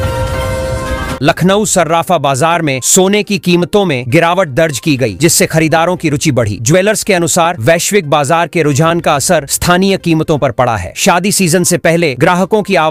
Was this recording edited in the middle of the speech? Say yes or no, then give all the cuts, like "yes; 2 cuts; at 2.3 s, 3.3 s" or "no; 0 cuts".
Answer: no; 0 cuts